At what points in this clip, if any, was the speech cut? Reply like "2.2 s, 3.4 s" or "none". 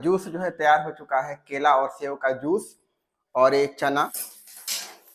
4.2 s